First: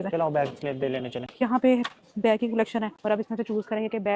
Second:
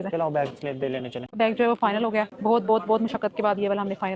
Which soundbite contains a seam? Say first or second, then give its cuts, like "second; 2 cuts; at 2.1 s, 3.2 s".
second; 1 cut; at 1.2 s